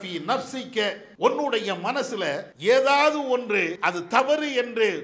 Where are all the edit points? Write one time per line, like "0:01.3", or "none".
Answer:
0:01.1
0:02.5
0:03.7